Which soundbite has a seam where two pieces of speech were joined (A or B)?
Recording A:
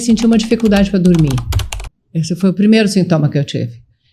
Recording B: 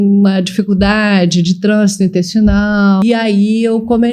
B